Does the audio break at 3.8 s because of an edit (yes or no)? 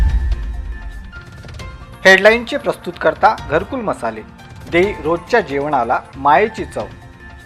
no